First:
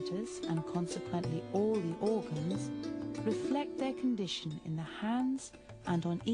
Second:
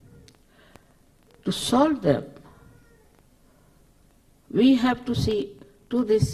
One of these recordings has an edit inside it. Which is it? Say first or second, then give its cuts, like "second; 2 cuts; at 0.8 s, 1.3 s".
second; 1 cut; at 1.6 s